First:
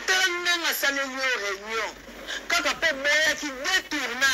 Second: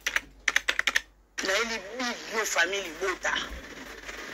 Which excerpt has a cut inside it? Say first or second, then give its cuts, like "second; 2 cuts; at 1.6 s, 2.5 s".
second; 1 cut; at 1.2 s